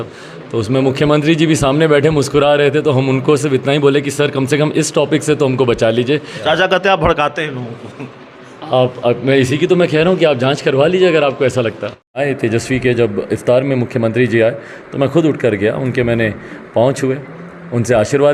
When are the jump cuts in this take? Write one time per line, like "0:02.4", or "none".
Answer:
0:06.4
0:12.2